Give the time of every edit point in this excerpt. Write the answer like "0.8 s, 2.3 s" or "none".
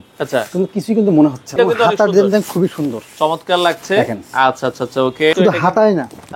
1.5 s, 5.3 s